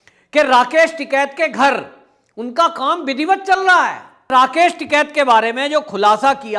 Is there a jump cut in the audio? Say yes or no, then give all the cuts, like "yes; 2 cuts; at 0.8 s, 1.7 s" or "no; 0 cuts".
yes; 1 cut; at 4.2 s